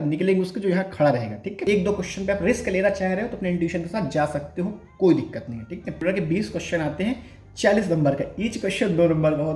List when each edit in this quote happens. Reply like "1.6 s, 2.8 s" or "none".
1.6 s, 6.0 s

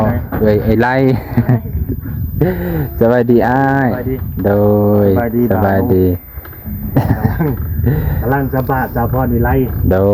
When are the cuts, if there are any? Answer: none

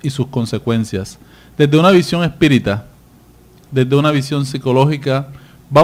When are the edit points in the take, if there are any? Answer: none

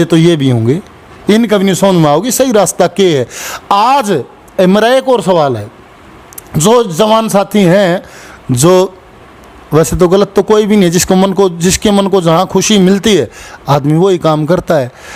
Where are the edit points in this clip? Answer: none

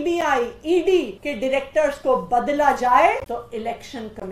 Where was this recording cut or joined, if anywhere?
1.2 s, 3.2 s

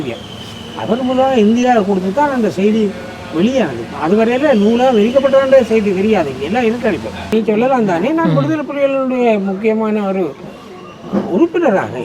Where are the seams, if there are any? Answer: 7.3 s

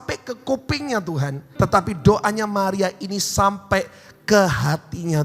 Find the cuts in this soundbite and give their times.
1.4 s

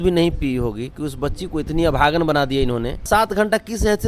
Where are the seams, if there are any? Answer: 3.1 s

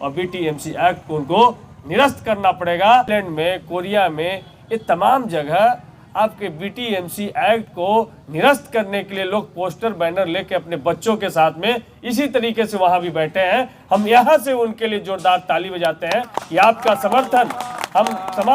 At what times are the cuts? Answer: 3.1 s

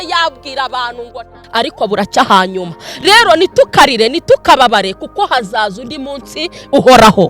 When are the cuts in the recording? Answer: 1.4 s

